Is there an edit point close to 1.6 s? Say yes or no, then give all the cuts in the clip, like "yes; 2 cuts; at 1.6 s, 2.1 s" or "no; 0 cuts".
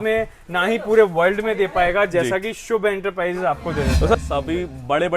no; 1 cut; at 4.1 s